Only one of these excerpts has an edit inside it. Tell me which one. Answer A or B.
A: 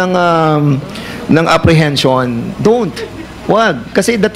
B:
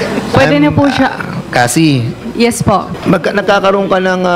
B